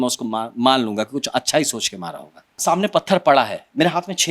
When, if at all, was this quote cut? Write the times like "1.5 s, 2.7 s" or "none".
2.5 s